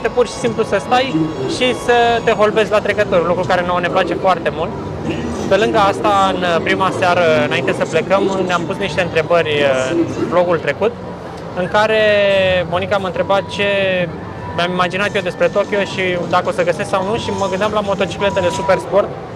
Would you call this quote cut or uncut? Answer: uncut